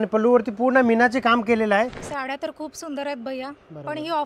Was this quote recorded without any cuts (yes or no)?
no